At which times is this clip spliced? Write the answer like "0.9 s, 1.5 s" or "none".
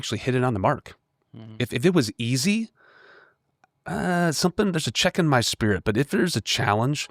none